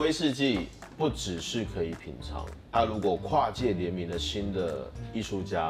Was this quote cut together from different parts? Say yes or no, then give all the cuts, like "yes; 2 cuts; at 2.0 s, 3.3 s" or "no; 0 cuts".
no; 0 cuts